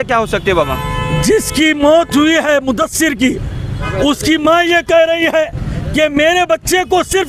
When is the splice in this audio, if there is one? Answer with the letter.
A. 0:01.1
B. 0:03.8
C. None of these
C